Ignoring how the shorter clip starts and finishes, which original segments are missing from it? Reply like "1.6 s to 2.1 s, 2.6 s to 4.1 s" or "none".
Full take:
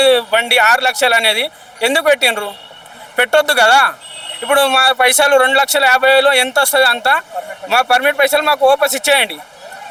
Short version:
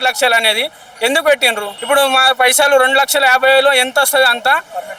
2.5 s to 4.3 s